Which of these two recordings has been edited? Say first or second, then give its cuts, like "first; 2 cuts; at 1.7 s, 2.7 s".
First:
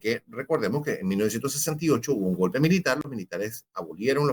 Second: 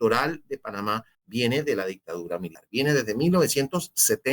second; 2 cuts; at 1.1 s, 2.6 s